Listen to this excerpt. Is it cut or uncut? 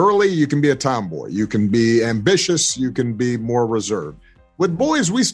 cut